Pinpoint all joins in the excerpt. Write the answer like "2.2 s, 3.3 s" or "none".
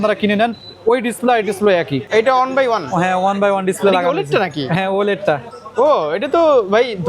2.0 s